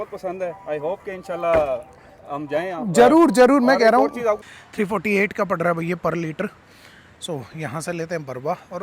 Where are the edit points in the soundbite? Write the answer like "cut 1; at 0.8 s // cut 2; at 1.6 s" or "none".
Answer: cut 1; at 4.5 s